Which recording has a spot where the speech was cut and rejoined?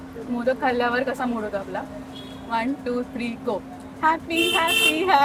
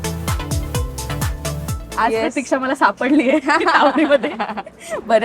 second; 1 cut; at 1.8 s

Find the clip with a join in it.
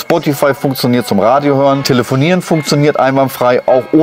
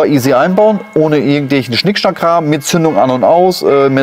first; 1 cut; at 1.8 s

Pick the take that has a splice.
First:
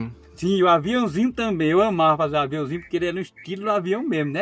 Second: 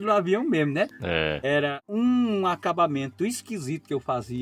second; 1 cut; at 1.8 s

